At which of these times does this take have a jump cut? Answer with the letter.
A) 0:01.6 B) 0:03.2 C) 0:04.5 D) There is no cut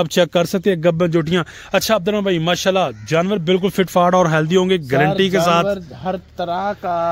D